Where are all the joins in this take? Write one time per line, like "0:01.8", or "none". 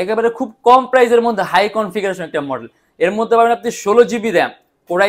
none